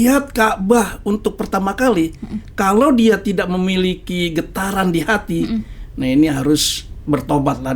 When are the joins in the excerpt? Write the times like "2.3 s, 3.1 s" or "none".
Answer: none